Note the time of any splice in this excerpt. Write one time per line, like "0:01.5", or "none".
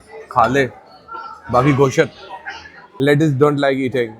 0:02.8